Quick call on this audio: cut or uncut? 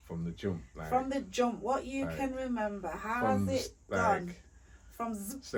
uncut